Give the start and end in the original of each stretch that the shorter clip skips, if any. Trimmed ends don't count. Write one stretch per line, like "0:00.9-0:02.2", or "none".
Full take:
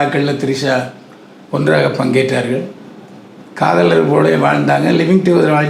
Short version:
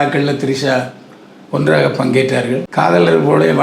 0:02.7-0:03.5